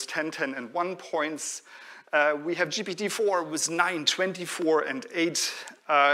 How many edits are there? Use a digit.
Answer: 0